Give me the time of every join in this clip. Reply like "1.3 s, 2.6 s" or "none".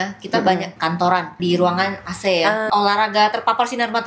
1.1 s, 2.7 s